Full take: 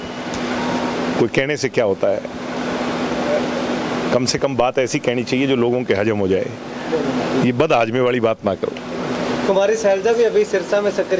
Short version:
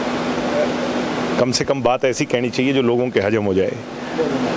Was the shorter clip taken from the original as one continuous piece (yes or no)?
yes